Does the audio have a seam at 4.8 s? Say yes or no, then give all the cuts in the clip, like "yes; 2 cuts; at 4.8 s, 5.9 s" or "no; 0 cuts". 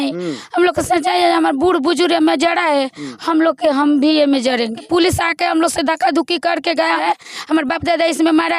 yes; 2 cuts; at 4.8 s, 7.0 s